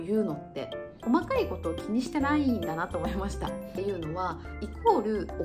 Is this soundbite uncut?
no; 2 cuts; at 1.0 s, 3.8 s

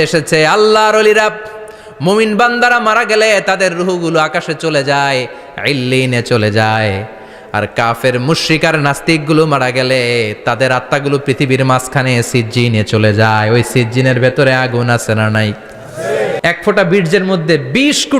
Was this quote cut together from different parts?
yes; 1 cut; at 16.4 s

